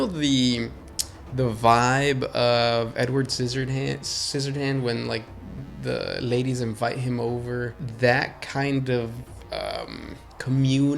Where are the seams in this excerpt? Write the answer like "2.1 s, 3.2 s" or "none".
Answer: 7.8 s